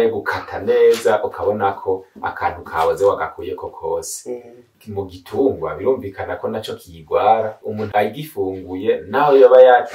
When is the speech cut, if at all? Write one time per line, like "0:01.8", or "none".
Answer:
0:04.7
0:07.8